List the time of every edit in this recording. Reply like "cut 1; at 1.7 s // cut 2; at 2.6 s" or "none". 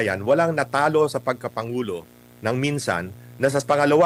none

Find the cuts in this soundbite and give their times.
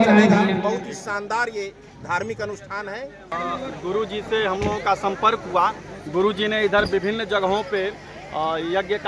cut 1; at 3.3 s

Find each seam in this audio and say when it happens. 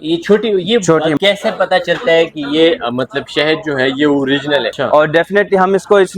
cut 1; at 1.2 s // cut 2; at 4.8 s

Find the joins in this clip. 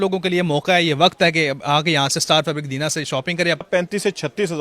cut 1; at 3.7 s

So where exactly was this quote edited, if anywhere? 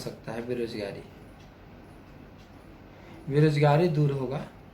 none

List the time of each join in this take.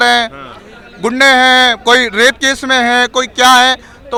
none

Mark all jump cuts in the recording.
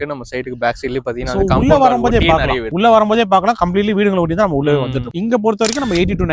cut 1; at 2.7 s // cut 2; at 5.1 s

